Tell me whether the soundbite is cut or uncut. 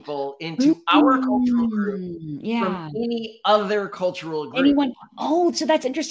uncut